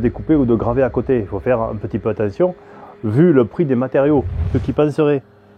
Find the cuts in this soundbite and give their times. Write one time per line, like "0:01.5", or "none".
0:04.4